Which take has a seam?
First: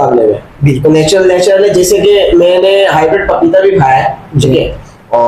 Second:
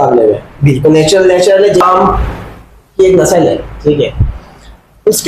second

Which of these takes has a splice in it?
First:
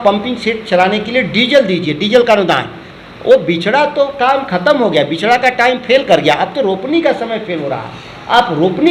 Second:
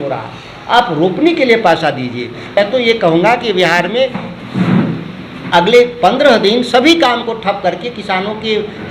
second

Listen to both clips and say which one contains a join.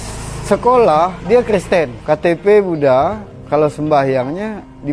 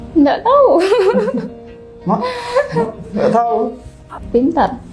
first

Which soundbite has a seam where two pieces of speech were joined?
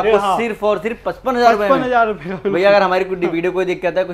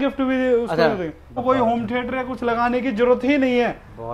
second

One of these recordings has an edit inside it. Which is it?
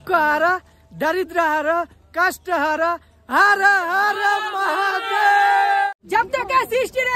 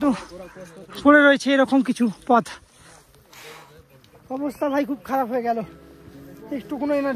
first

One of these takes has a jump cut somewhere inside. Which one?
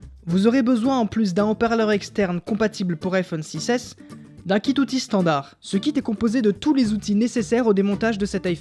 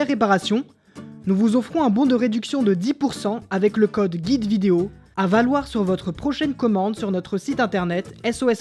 second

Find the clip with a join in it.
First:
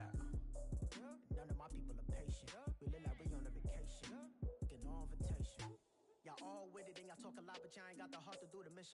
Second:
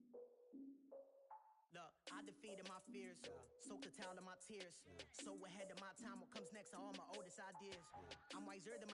second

